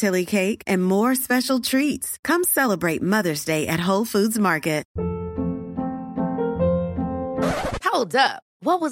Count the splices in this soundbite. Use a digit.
1